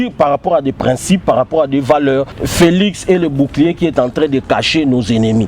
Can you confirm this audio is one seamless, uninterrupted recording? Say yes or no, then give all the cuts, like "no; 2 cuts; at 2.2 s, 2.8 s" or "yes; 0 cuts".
no; 1 cut; at 2.4 s